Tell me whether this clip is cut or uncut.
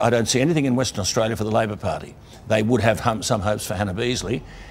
cut